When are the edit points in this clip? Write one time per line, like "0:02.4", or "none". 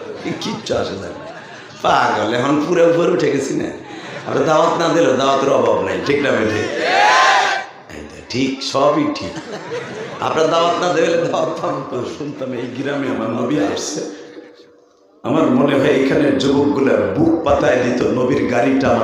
0:12.1